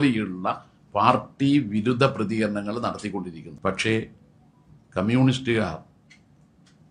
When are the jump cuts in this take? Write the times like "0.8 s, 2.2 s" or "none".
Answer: 3.4 s

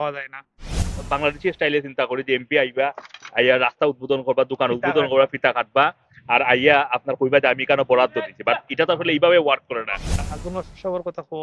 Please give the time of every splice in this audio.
1.0 s, 10.2 s

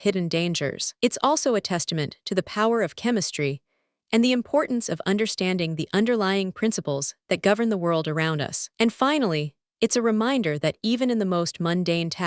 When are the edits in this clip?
8.6 s

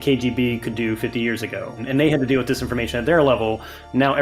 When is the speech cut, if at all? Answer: 1.8 s

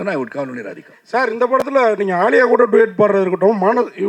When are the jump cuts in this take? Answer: none

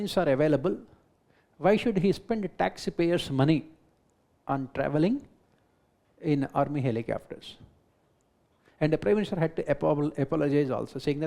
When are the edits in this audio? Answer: none

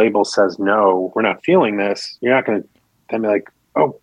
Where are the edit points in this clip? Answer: 1.1 s, 2.1 s

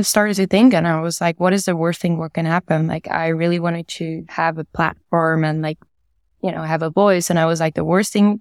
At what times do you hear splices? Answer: none

